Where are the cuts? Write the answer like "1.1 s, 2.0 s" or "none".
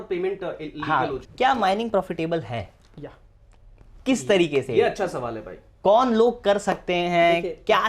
1.2 s